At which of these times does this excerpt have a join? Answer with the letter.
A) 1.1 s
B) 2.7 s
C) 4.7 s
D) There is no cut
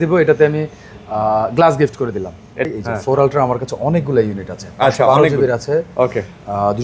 B